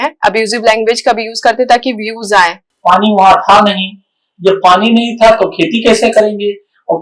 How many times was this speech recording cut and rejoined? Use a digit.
1